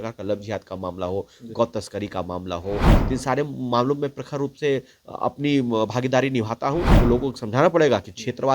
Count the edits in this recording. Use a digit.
1